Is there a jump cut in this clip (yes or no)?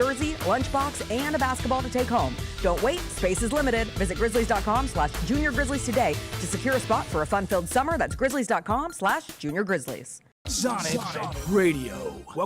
yes